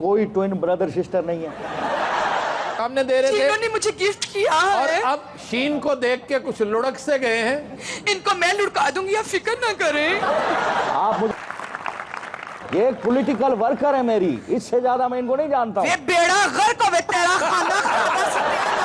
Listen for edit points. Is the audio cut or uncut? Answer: cut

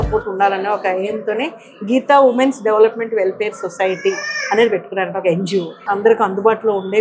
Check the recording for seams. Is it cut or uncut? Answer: cut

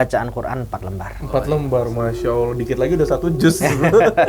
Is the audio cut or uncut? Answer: uncut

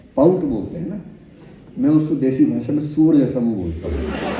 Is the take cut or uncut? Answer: uncut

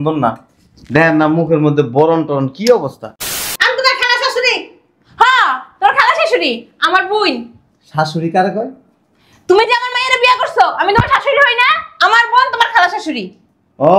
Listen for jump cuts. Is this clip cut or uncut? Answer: cut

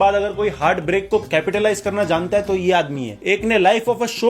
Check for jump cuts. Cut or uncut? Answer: uncut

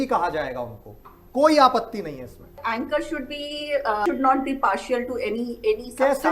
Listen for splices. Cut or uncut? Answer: cut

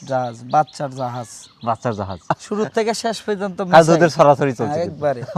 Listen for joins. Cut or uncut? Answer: cut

